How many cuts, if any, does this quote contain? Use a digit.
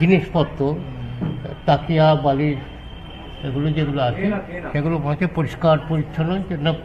0